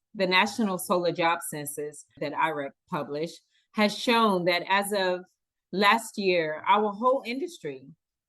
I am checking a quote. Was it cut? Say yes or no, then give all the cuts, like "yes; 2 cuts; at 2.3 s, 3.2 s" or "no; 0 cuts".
yes; 1 cut; at 2.2 s